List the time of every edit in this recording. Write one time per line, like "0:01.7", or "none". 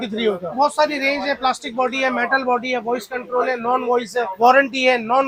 none